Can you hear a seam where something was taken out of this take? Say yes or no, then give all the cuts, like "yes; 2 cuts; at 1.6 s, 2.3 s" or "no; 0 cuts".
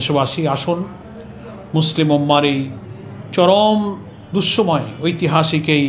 no; 0 cuts